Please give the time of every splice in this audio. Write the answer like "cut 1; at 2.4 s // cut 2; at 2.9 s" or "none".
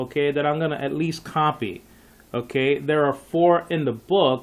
cut 1; at 0.9 s